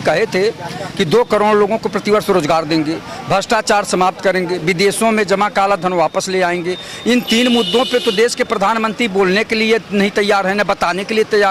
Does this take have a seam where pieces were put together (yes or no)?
no